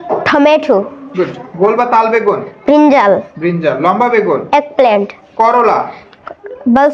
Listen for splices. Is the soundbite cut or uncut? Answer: uncut